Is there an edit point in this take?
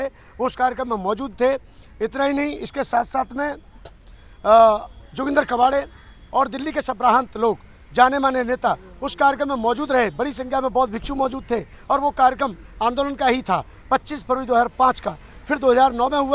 no; 0 cuts

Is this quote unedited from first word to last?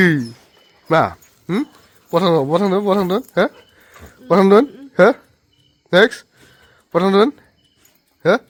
yes; 0 cuts

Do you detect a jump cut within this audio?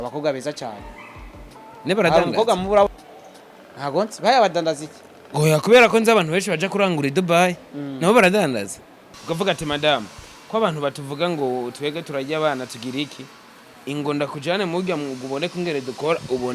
yes; 1 cut; at 9.2 s

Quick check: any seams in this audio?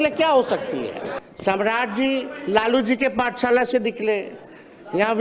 yes; 1 cut; at 1.2 s

